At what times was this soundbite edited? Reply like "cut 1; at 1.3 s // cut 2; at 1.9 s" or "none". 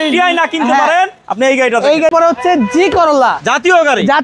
cut 1; at 2.1 s